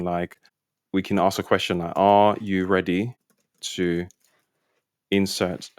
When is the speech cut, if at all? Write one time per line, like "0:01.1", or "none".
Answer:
none